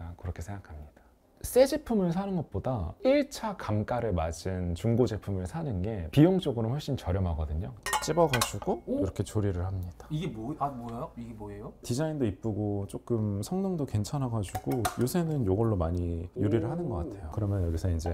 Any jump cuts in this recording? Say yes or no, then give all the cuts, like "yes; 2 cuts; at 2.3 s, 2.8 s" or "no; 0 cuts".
yes; 5 cuts; at 1.1 s, 2.9 s, 7.8 s, 11.8 s, 17.2 s